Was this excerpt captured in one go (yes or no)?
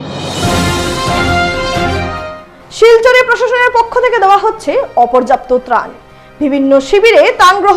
no